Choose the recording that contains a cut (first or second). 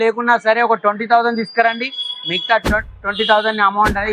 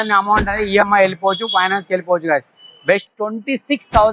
second